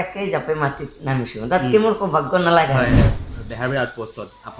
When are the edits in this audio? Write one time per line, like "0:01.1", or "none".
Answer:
0:03.0